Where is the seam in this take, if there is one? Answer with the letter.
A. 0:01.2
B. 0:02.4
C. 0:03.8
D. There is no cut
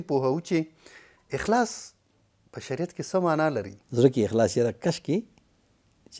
C